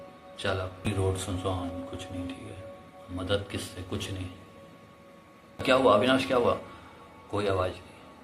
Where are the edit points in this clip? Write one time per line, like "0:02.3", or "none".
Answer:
0:00.9
0:05.6